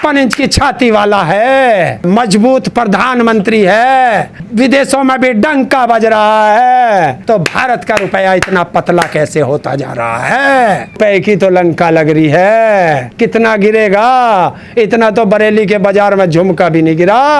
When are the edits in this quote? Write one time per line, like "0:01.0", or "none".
0:02.0
0:04.4
0:07.2
0:11.0
0:13.1

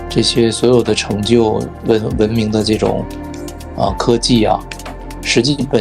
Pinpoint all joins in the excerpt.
none

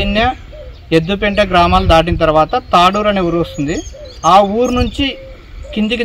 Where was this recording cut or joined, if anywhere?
none

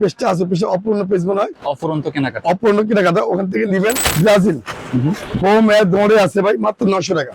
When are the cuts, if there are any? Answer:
0:04.0

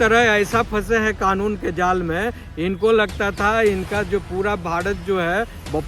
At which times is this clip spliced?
none

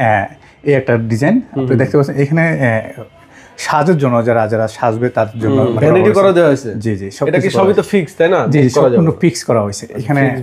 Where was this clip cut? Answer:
0:05.8

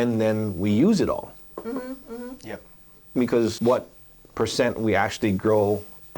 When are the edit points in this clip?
0:03.6

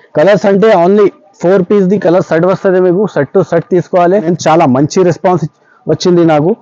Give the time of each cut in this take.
0:04.2

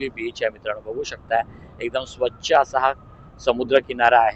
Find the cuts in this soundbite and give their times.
none

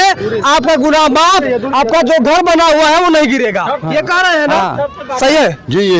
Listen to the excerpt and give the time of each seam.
none

